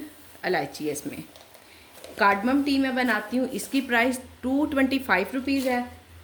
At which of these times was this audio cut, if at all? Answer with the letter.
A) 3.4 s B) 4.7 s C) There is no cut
C